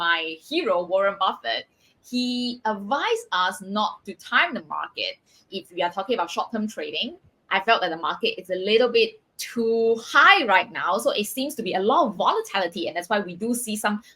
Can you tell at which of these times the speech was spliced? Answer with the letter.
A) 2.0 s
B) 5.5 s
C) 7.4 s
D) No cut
B